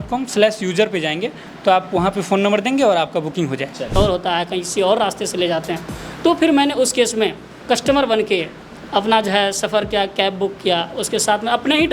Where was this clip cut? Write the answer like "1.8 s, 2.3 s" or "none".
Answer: 3.9 s